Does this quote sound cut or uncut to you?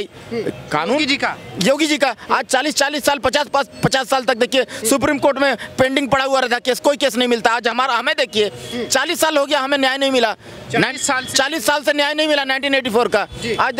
uncut